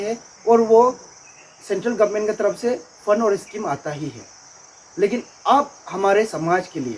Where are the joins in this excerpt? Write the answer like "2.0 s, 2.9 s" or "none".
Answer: none